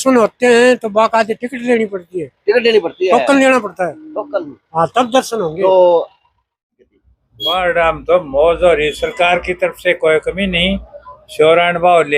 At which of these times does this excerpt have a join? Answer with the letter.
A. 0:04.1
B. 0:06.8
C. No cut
B